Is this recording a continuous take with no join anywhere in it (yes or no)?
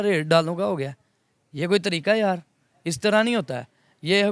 yes